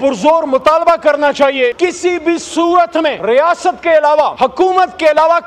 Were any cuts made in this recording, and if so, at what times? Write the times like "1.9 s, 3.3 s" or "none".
1.7 s, 3.2 s, 4.3 s